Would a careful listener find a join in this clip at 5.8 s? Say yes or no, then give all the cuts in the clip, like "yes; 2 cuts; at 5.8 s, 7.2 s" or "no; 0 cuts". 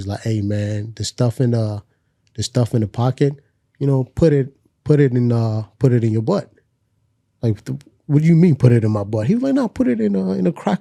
no; 0 cuts